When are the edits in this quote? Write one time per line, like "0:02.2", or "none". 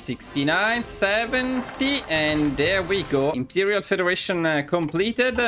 0:03.4